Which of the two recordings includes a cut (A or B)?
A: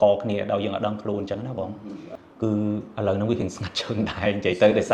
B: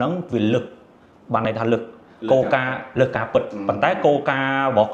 A